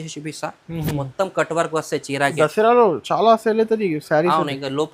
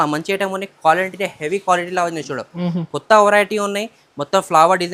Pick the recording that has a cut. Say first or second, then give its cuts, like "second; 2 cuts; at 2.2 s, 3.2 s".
first; 1 cut; at 2.3 s